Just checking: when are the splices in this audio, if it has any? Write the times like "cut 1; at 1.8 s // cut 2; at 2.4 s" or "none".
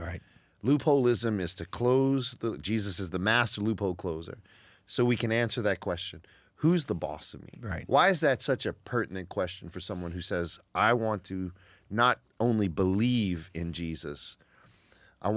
none